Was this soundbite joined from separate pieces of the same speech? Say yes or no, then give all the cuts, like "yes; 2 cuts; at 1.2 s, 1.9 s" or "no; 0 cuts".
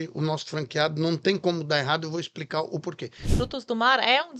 yes; 1 cut; at 3.3 s